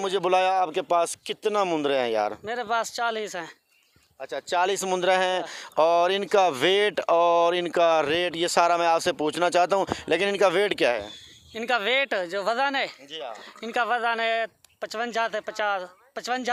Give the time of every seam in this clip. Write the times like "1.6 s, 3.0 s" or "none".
none